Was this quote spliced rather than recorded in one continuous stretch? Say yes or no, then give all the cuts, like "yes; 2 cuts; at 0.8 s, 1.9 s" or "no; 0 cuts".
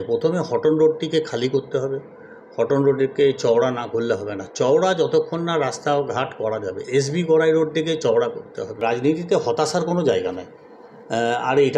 yes; 1 cut; at 8.8 s